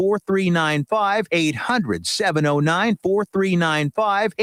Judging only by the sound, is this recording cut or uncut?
uncut